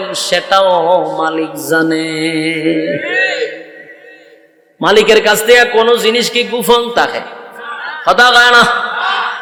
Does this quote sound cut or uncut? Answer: uncut